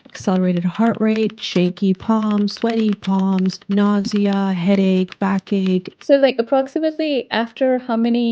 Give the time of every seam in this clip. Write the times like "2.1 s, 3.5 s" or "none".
3.6 s, 6.0 s

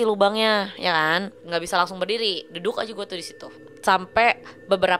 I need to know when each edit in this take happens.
1.4 s, 3.7 s

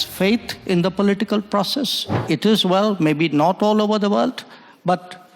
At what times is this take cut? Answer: 2.3 s

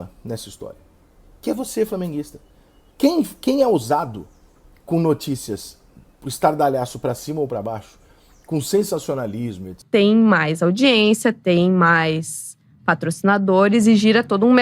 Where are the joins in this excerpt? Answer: 9.8 s

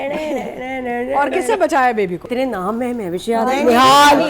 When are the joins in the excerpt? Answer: 2.3 s

